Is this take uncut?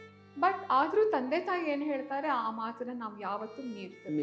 yes; 0 cuts

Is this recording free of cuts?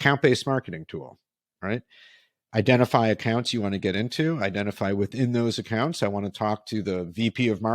yes; 0 cuts

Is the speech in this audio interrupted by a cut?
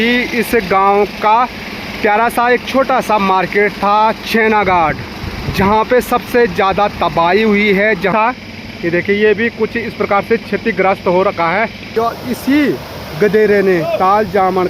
yes; 2 cuts; at 8.1 s, 11.9 s

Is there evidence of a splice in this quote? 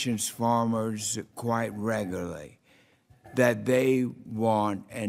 yes; 1 cut; at 2.3 s

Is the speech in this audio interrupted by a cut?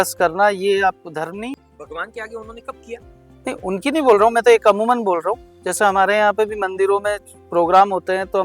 yes; 1 cut; at 1.5 s

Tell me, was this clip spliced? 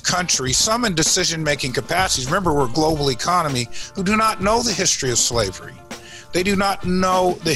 no; 0 cuts

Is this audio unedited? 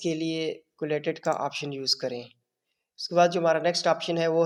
yes; 0 cuts

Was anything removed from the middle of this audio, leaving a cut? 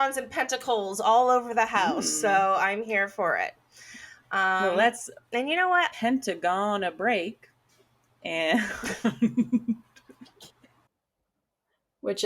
yes; 1 cut; at 10.9 s

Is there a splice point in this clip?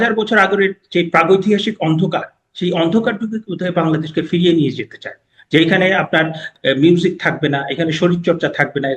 yes; 1 cut; at 6.5 s

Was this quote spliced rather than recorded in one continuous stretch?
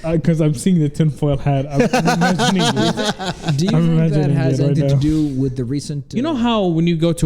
yes; 1 cut; at 6.0 s

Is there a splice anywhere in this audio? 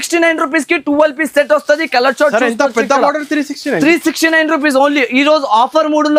no; 0 cuts

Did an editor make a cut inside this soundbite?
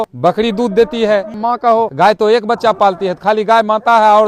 no; 0 cuts

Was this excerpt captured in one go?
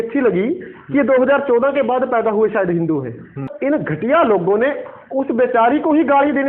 no; 1 cut; at 3.4 s

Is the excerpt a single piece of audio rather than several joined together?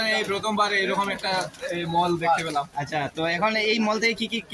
yes; 0 cuts

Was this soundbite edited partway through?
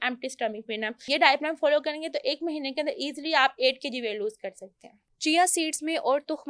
yes; 2 cuts; at 1.0 s, 5.1 s

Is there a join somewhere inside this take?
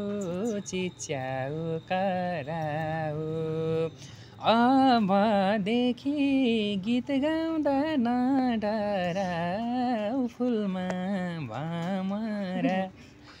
no; 0 cuts

